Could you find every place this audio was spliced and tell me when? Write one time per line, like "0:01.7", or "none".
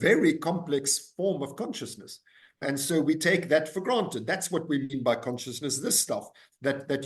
0:02.6